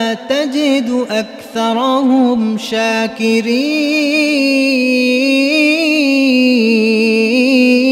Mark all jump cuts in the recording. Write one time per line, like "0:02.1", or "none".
none